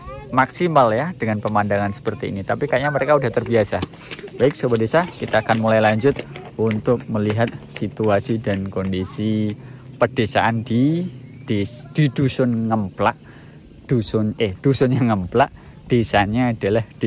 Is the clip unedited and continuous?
yes; 0 cuts

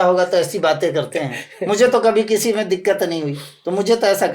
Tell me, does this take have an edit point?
no; 0 cuts

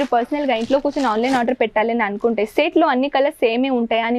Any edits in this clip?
no; 0 cuts

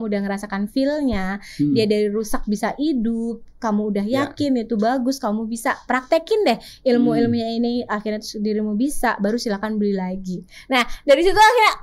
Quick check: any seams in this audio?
no; 0 cuts

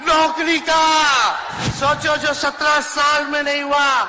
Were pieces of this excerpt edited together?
yes; 1 cut; at 1.6 s

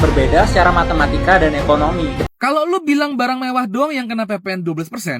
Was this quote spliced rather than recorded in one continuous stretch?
yes; 1 cut; at 2.2 s

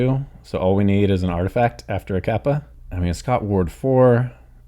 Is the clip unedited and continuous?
no; 1 cut; at 2.8 s

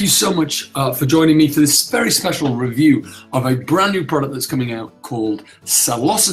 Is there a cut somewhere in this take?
no; 0 cuts

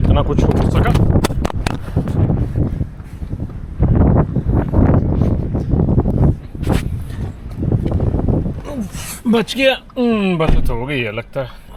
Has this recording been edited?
no; 0 cuts

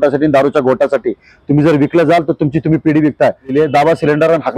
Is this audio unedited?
no; 1 cut; at 3.5 s

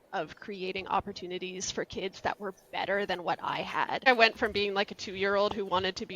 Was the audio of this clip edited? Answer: yes; 1 cut; at 4.0 s

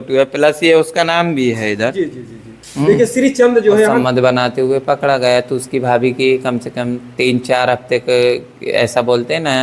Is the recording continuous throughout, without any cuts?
no; 1 cut; at 3.9 s

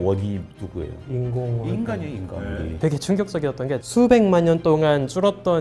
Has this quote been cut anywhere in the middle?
yes; 2 cuts; at 2.8 s, 3.8 s

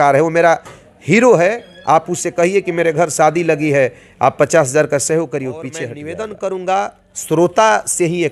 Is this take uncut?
no; 1 cut; at 5.9 s

